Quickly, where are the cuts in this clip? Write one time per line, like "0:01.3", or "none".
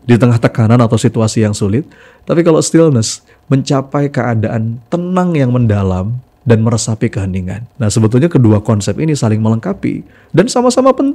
0:07.6